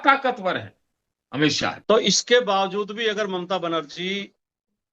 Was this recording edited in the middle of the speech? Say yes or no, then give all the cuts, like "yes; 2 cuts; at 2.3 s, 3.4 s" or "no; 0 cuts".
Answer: yes; 1 cut; at 1.7 s